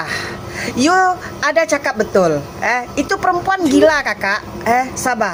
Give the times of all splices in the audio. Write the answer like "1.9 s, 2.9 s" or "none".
none

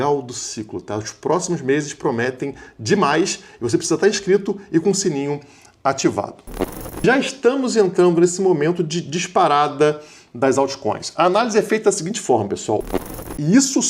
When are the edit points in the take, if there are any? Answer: 6.6 s, 13.0 s

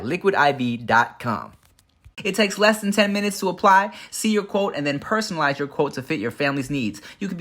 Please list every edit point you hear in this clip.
2.1 s

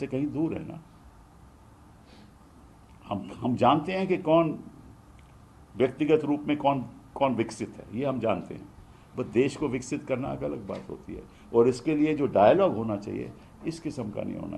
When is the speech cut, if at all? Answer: none

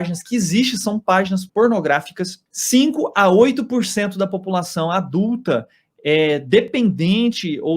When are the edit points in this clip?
1.5 s

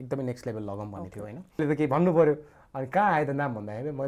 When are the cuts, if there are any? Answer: 1.6 s

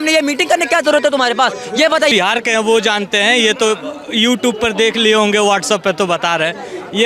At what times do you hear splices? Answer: 2.1 s

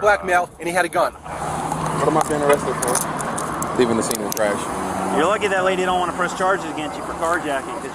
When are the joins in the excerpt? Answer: 1.4 s, 4.7 s

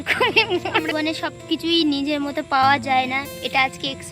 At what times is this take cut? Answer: 0.9 s

